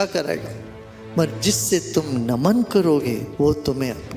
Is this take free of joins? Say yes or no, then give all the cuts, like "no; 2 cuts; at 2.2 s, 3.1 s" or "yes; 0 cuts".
no; 1 cut; at 3.3 s